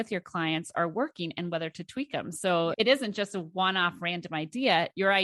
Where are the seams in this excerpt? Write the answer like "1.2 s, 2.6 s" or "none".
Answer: 2.7 s